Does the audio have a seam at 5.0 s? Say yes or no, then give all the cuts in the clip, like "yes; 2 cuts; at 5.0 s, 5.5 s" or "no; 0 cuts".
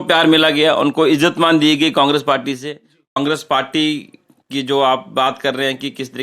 no; 1 cut; at 3.1 s